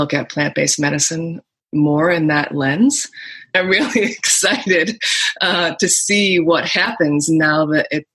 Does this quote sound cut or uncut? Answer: cut